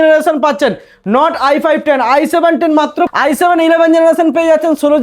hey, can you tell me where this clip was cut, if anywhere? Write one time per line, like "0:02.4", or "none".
0:03.1

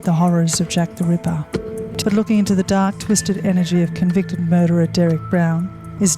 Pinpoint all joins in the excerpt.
none

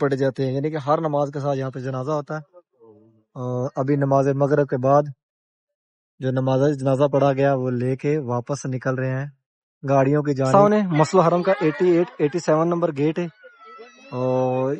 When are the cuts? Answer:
0:10.5

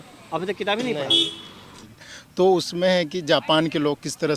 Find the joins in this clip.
0:01.6

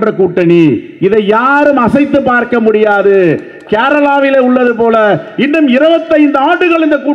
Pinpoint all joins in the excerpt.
none

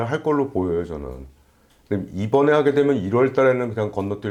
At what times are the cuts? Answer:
none

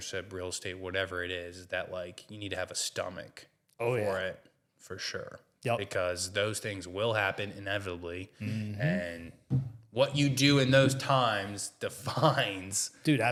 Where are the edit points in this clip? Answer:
none

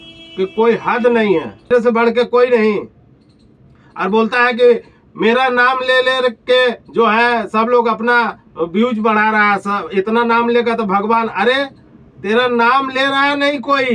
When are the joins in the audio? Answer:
0:01.7

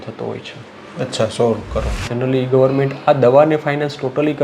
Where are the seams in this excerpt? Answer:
0:02.1

